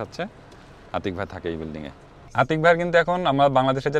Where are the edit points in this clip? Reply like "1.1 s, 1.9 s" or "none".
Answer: 2.3 s